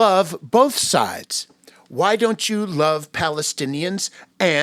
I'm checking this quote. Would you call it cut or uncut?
uncut